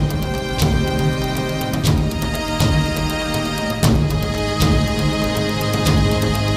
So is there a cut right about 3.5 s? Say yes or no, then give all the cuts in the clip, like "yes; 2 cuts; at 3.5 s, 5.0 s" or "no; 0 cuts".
no; 0 cuts